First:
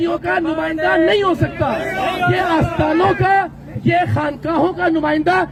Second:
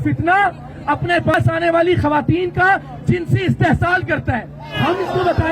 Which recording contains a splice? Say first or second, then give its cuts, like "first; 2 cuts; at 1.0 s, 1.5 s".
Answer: second; 2 cuts; at 1.3 s, 4.7 s